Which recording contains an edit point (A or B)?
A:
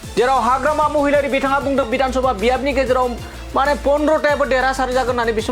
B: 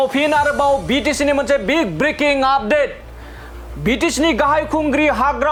A